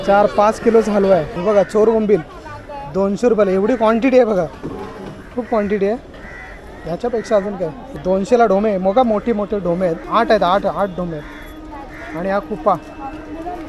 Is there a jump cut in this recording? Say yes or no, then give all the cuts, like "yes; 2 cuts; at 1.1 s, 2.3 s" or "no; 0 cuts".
yes; 3 cuts; at 1.3 s, 7.8 s, 10.0 s